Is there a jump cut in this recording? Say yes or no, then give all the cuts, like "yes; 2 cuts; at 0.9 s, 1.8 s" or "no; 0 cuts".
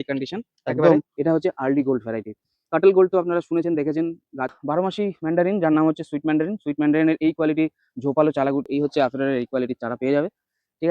yes; 3 cuts; at 1.1 s, 4.6 s, 8.5 s